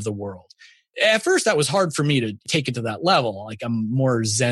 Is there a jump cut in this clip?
yes; 2 cuts; at 0.9 s, 2.5 s

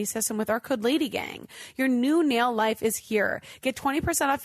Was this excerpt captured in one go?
yes; 0 cuts

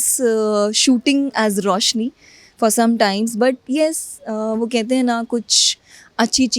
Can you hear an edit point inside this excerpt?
no; 0 cuts

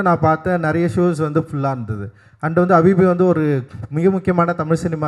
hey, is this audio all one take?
yes; 0 cuts

